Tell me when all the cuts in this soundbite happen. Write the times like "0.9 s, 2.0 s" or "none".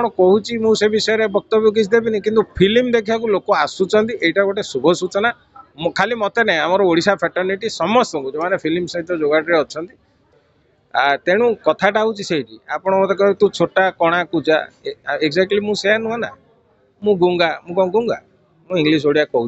10.2 s